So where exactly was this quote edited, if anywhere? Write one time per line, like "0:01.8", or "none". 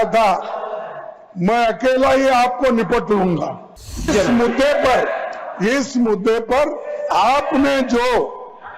0:04.1

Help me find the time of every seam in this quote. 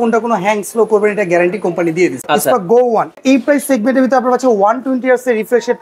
0:02.2
0:03.2

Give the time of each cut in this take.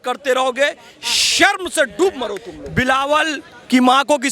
0:02.5

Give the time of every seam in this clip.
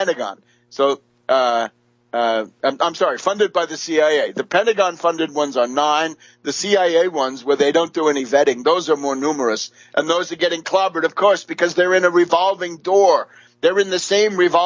none

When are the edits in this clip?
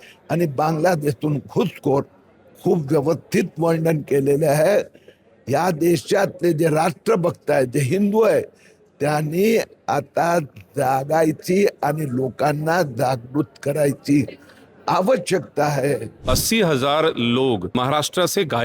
0:16.1
0:17.7

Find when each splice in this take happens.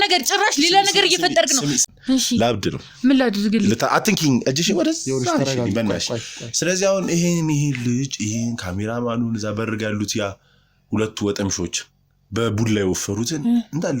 0:01.9

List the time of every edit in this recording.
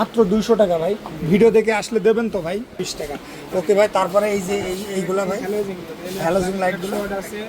0:02.9

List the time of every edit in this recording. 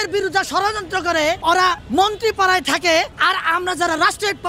0:01.6
0:03.2

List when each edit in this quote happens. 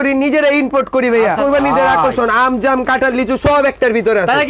0:01.4

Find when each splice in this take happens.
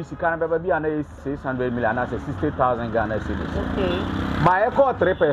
0:01.3

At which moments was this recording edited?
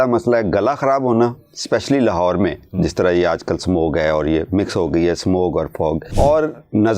0:06.1

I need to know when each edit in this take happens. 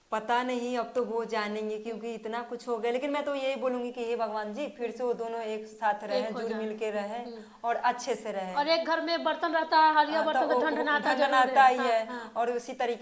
none

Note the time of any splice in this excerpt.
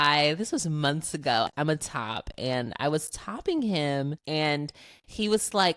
0:01.5
0:04.2

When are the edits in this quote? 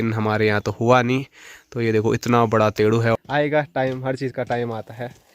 0:03.2

